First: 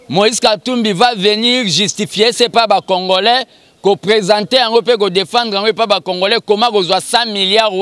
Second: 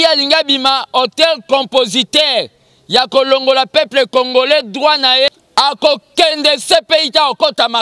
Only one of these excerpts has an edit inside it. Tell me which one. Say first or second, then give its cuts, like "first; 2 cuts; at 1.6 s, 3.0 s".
second; 1 cut; at 5.3 s